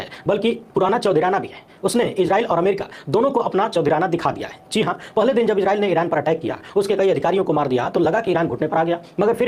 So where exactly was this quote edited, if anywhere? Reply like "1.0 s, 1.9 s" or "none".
none